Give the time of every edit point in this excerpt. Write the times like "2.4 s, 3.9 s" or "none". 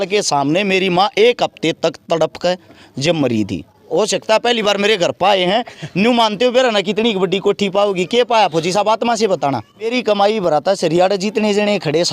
3.8 s, 9.9 s